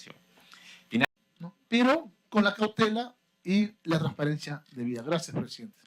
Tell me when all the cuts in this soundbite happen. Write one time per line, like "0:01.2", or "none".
0:01.0